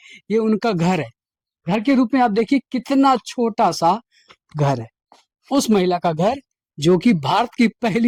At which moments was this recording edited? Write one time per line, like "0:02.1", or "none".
none